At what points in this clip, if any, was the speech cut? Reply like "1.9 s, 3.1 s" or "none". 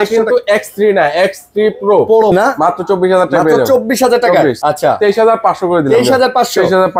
2.3 s, 4.6 s